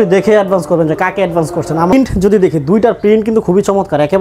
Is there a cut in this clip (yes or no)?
yes